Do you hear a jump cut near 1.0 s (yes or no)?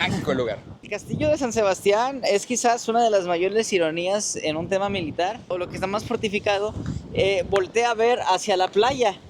yes